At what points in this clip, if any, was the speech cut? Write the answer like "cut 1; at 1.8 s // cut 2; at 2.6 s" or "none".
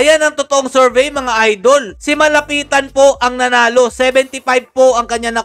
none